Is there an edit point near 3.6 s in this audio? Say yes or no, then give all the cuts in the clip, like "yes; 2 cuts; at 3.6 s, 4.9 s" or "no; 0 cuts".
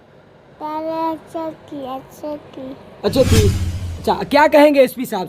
yes; 1 cut; at 3.6 s